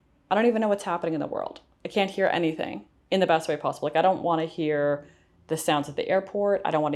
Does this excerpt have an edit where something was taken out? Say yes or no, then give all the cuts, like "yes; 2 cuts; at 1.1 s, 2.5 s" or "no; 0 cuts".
no; 0 cuts